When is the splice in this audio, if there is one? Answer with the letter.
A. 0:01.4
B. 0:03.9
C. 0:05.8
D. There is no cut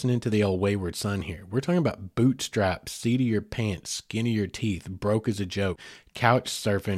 C